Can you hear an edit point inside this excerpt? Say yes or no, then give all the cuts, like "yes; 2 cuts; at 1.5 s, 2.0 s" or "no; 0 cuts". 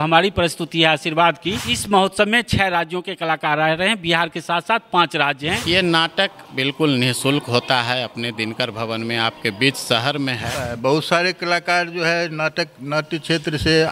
yes; 3 cuts; at 1.7 s, 5.6 s, 10.6 s